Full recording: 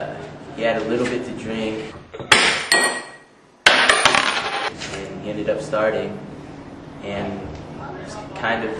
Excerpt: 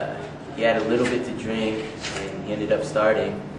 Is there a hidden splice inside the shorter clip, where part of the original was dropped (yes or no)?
yes